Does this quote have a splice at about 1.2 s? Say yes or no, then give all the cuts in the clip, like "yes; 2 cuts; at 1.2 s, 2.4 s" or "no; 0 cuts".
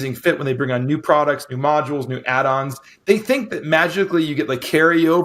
no; 0 cuts